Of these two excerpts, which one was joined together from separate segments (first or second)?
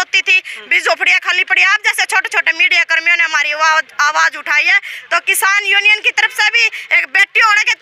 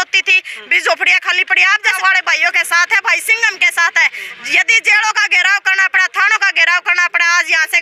second